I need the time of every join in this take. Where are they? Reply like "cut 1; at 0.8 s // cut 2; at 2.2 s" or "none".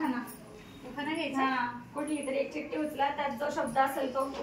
none